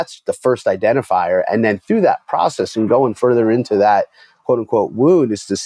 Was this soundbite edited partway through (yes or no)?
no